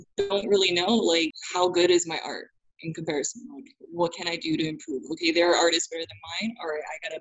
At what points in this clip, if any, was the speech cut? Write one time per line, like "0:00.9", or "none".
0:01.4

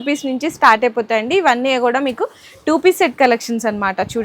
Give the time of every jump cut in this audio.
none

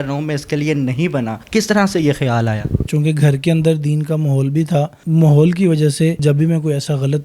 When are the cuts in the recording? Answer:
0:01.4
0:02.9
0:05.0
0:06.2

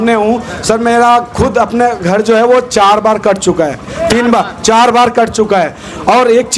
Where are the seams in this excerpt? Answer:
none

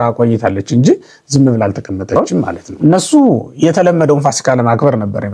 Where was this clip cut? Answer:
0:02.2

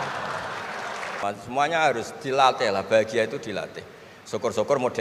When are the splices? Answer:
0:01.1

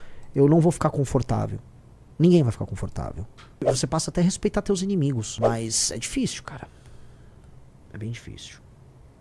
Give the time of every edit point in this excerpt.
0:03.6
0:05.3

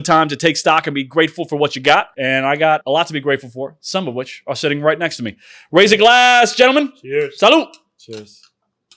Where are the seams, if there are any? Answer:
none

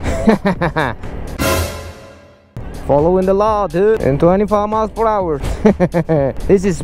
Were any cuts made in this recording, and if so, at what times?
0:04.0

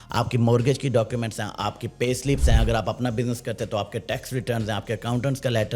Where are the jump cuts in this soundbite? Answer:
none

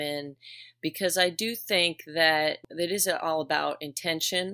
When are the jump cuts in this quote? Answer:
0:02.6

